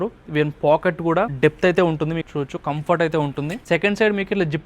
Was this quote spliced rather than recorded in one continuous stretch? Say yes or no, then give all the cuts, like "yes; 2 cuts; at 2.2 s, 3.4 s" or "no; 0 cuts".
yes; 2 cuts; at 1.3 s, 2.2 s